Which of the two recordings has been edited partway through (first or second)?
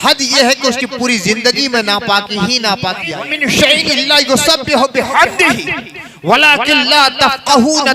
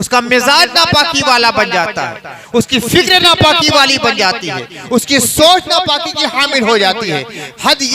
first